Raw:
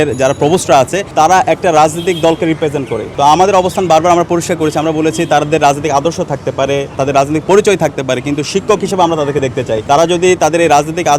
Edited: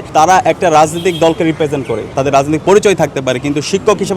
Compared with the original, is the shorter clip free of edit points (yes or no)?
no